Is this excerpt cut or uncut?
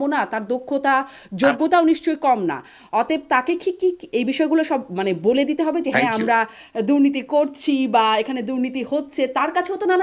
uncut